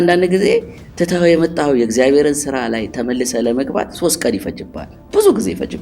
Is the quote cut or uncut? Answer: uncut